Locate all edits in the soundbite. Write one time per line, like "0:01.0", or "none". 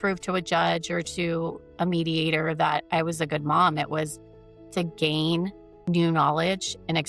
0:05.7